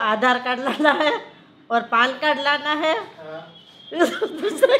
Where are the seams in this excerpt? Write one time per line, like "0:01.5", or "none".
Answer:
none